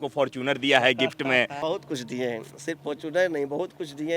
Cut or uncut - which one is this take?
cut